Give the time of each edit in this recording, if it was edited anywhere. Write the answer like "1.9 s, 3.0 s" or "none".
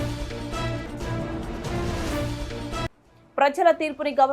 2.6 s